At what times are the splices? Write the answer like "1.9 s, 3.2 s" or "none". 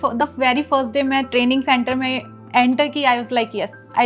none